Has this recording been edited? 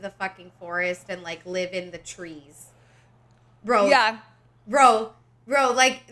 no; 0 cuts

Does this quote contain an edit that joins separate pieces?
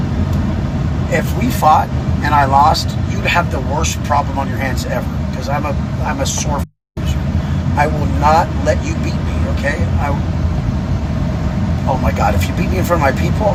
no; 0 cuts

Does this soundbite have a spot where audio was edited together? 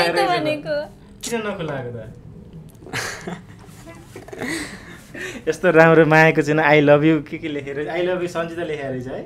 no; 0 cuts

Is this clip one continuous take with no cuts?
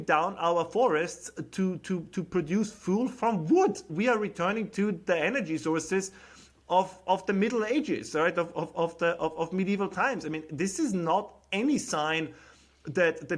no; 1 cut; at 3.9 s

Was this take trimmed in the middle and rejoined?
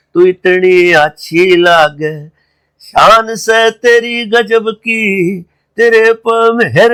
no; 0 cuts

